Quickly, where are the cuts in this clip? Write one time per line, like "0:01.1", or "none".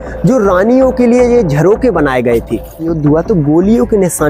0:02.9